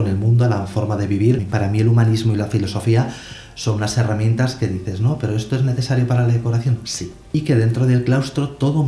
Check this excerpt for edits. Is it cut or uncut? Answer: cut